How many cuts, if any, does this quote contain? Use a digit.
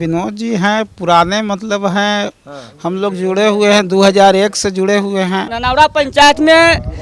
1